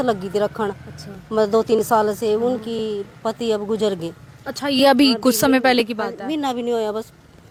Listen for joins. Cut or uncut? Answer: uncut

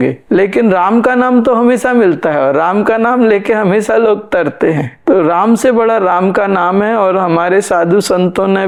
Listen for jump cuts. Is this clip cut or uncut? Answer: uncut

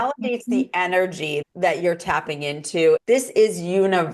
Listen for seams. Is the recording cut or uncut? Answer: cut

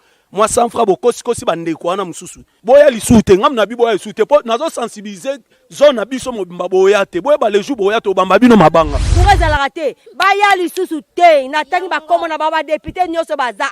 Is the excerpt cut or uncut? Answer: cut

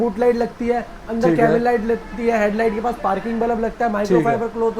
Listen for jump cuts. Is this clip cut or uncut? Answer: uncut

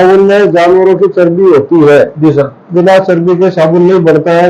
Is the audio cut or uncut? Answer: cut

